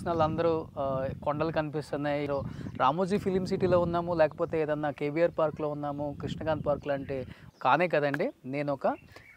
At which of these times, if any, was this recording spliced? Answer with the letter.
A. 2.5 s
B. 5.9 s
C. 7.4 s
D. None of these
C